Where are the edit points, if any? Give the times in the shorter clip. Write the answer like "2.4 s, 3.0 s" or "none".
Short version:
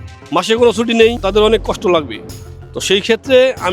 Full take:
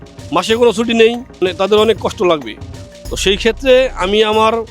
1.2 s